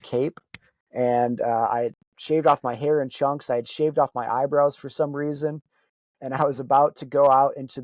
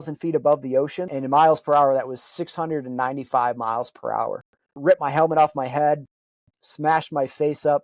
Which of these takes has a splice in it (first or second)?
second